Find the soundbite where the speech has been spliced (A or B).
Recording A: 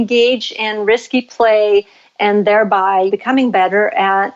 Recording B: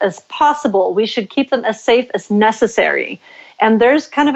A